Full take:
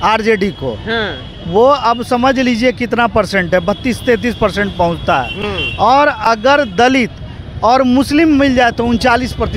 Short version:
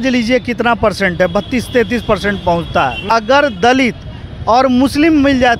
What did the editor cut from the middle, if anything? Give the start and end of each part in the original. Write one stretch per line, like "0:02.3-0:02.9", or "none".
0:05.3-0:06.2